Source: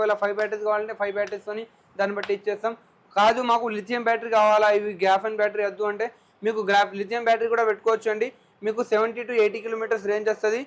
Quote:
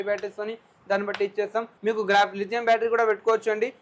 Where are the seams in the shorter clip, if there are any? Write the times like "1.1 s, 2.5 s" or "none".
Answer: 1.7 s